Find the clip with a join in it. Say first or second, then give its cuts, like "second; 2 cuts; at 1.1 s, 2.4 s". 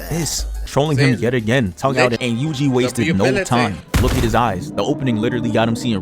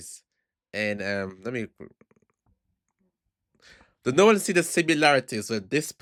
first; 1 cut; at 2.2 s